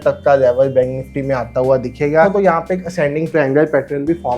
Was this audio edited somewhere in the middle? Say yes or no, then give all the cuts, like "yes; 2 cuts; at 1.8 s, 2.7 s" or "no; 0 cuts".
yes; 1 cut; at 2.3 s